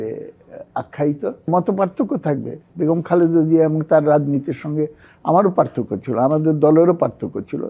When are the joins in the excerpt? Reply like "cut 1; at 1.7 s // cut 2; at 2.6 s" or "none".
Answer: cut 1; at 1.5 s